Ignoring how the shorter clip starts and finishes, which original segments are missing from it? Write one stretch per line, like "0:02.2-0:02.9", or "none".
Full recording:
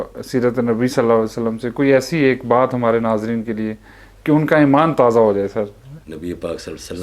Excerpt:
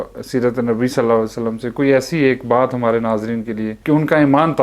0:03.7-0:04.1